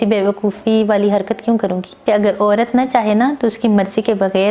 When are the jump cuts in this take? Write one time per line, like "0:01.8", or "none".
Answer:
0:02.0

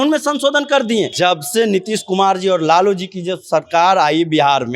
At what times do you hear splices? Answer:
0:01.1

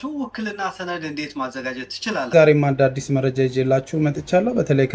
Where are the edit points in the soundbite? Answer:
0:02.3

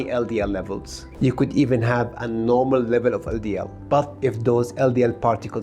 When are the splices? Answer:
0:01.1

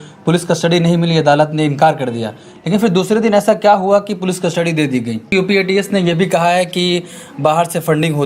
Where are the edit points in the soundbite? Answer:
0:05.3

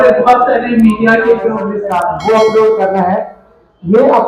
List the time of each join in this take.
0:01.7

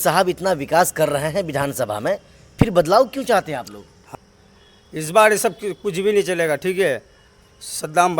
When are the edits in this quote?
0:04.0

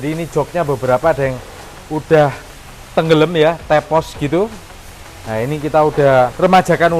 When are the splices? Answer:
none

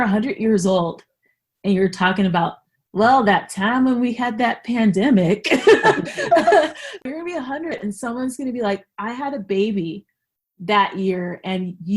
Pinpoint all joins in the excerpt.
0:06.8

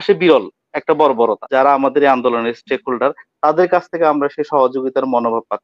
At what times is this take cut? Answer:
0:01.4

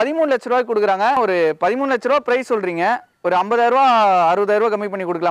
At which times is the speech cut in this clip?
0:01.2

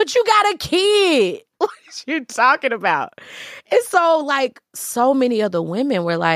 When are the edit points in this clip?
none

